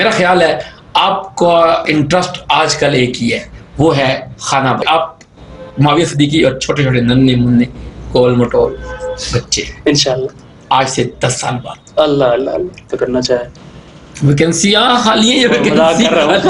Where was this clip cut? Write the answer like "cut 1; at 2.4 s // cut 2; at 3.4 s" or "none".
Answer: cut 1; at 4.8 s // cut 2; at 12.9 s